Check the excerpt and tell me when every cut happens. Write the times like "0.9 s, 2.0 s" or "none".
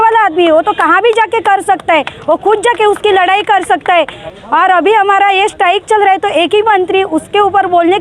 4.2 s